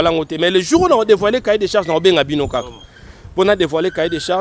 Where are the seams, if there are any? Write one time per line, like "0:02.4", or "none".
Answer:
none